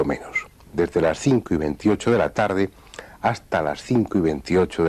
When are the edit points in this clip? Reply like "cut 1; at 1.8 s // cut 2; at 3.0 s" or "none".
cut 1; at 3.0 s